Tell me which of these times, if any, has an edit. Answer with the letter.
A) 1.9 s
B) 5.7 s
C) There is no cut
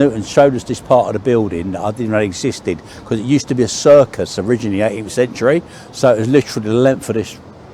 C